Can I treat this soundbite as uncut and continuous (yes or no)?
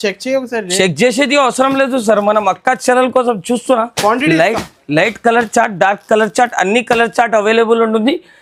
yes